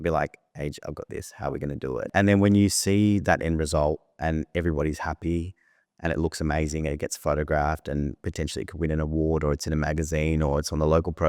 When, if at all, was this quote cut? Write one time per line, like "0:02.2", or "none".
0:02.1